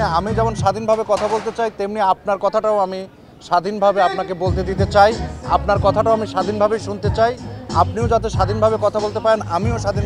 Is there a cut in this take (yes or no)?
no